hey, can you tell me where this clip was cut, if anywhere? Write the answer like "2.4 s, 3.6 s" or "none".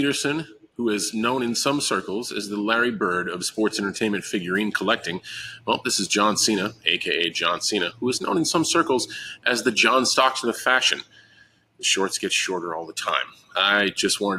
none